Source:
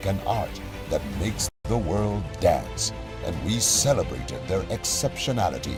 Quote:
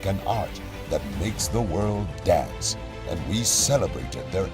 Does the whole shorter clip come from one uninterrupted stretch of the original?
no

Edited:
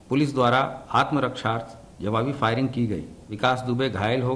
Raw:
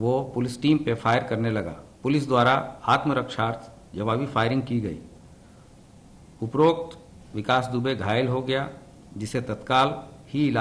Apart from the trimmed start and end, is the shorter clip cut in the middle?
yes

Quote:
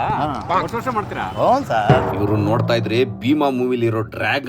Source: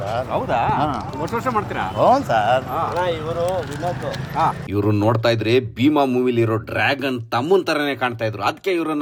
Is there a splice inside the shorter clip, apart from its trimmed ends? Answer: yes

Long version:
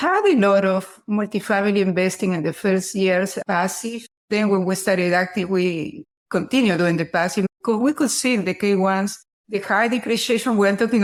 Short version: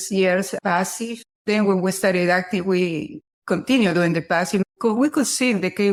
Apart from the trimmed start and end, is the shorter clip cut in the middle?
no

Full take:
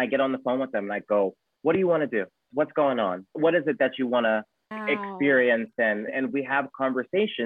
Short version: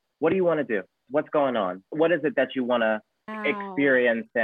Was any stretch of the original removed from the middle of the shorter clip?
no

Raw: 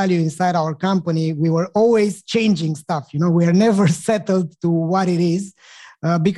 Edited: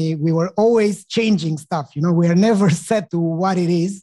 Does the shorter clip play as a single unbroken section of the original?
no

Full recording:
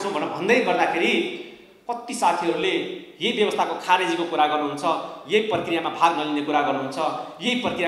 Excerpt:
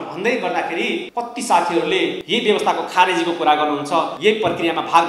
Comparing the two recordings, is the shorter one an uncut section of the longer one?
no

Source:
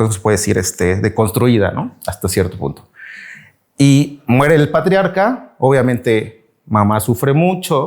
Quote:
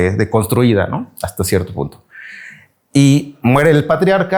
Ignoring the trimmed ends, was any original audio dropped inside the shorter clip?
no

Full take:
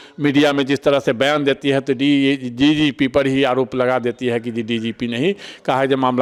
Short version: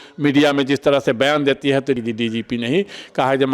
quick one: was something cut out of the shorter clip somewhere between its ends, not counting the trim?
yes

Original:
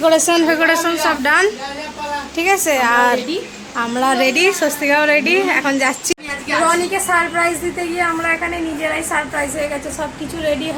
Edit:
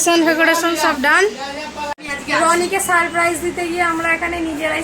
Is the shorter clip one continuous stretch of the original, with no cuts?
no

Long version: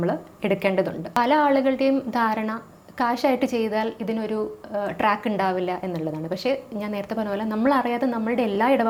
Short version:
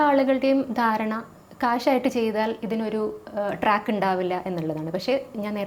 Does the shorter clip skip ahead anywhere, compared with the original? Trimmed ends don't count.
no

